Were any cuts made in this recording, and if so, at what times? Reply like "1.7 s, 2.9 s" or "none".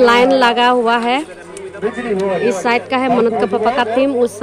none